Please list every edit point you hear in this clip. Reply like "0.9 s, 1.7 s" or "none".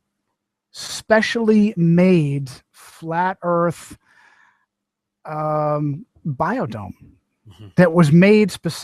1.2 s